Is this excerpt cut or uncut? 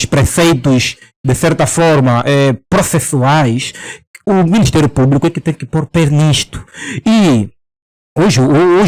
uncut